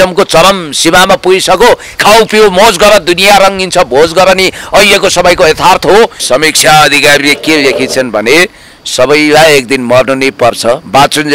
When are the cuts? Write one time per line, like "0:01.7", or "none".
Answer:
0:06.2